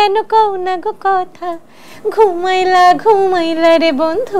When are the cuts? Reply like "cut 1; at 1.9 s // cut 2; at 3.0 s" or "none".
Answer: none